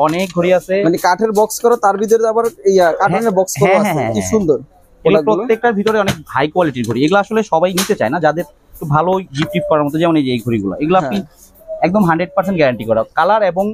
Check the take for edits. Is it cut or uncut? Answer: uncut